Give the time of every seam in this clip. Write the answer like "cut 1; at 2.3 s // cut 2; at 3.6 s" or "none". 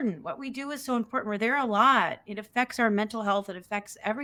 none